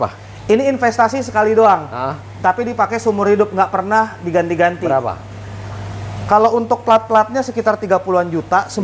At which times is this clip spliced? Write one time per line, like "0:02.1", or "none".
none